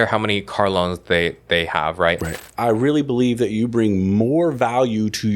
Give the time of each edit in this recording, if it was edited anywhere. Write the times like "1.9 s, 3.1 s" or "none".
2.4 s